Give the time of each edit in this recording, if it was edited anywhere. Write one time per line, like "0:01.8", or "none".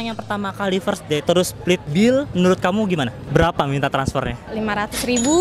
0:03.2

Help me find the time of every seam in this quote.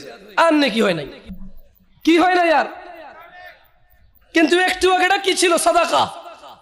none

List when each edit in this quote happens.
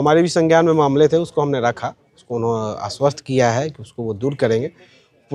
none

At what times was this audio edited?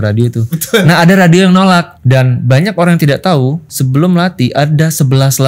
0:01.9

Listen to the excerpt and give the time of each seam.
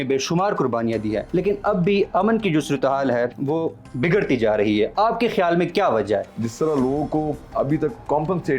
0:01.2
0:03.4
0:06.3
0:07.4

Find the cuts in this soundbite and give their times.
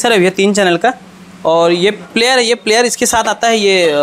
none

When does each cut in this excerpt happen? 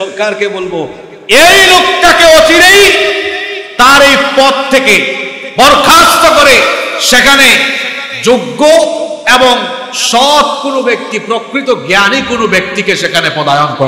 none

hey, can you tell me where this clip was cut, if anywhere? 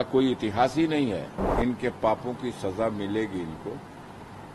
0:01.5

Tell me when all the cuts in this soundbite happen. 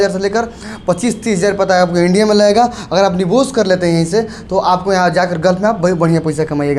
none

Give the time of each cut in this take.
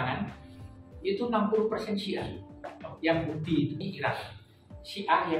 0:03.8

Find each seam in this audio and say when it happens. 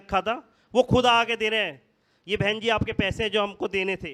none

